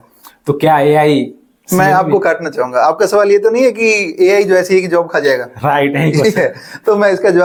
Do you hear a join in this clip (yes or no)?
no